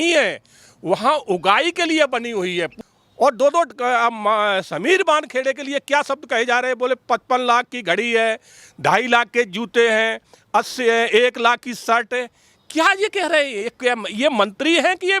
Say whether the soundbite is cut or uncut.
cut